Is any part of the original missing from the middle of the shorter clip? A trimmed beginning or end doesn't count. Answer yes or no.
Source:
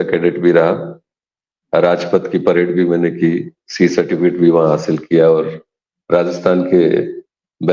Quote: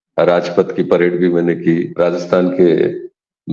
yes